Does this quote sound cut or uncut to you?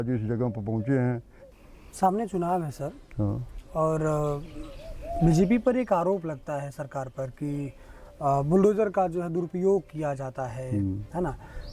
cut